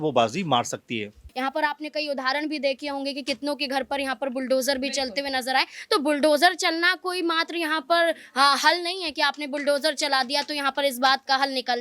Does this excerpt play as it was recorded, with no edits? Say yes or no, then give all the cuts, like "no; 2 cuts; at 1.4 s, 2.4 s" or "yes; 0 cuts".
no; 1 cut; at 1.3 s